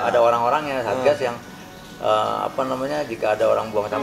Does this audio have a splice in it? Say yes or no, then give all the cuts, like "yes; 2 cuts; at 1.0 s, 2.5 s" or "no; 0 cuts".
no; 0 cuts